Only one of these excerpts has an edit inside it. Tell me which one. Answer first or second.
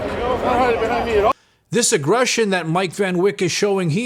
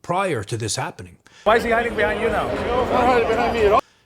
second